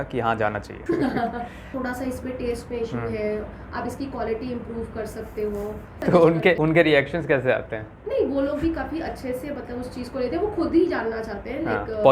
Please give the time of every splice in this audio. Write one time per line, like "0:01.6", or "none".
0:01.7